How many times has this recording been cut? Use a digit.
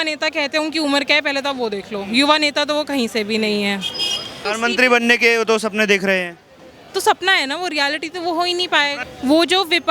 2